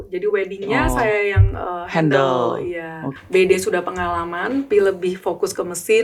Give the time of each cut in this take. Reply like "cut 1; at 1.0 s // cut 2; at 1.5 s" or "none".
cut 1; at 3.1 s // cut 2; at 4.7 s